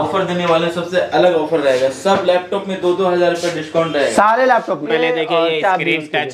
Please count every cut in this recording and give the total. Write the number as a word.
one